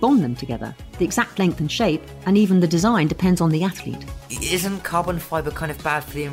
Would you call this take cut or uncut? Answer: uncut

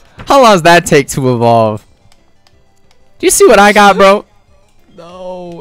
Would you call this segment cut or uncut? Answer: uncut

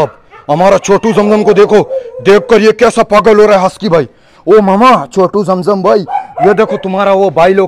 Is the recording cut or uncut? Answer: uncut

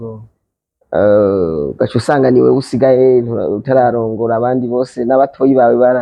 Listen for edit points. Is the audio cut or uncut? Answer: uncut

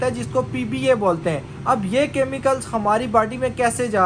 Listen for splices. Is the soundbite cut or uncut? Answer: uncut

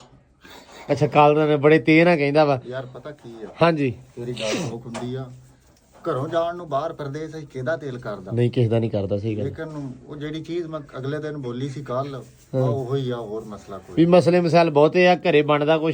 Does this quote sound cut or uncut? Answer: uncut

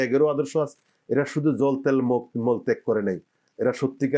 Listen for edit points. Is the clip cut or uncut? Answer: uncut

